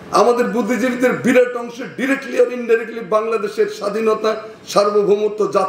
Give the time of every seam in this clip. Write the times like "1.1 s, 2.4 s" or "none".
none

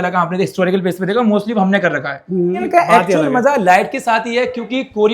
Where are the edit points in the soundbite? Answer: 2.6 s

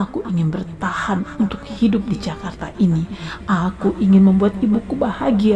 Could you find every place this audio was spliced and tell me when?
none

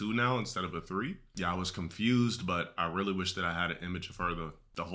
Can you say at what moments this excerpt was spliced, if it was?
1.2 s

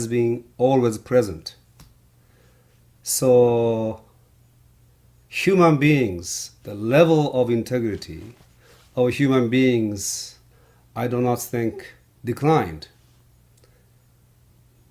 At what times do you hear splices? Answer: 3.6 s

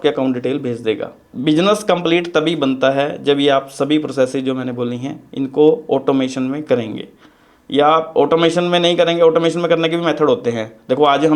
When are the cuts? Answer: 1.3 s

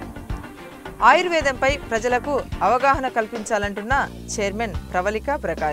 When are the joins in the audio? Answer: 1.0 s

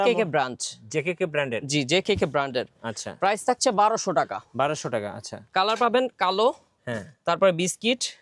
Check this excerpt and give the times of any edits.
none

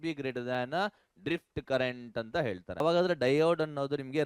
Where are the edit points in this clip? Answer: 2.8 s

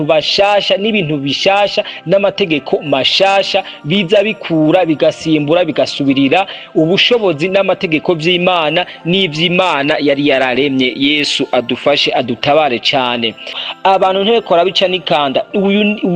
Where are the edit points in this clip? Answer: 13.6 s

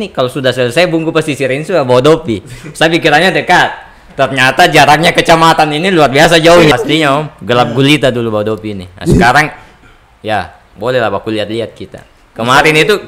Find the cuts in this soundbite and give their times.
6.7 s

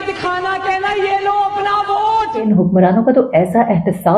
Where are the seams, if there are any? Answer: 2.4 s

